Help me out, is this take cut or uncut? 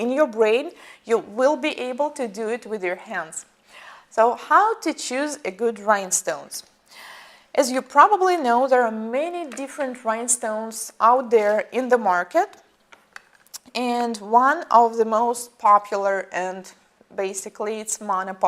uncut